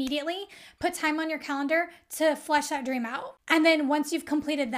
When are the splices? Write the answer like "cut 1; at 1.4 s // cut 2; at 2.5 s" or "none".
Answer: cut 1; at 3.4 s